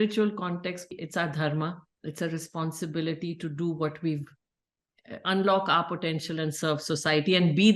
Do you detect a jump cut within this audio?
yes; 1 cut; at 0.9 s

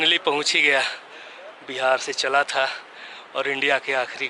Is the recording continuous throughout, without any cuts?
yes; 0 cuts

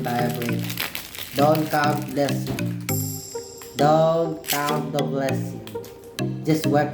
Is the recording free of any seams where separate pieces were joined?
yes; 0 cuts

